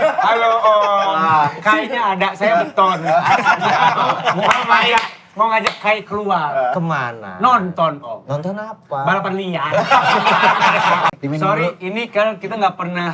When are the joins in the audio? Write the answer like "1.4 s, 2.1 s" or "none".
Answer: 11.2 s